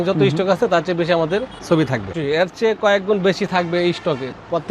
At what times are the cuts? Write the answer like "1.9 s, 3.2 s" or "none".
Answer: 2.1 s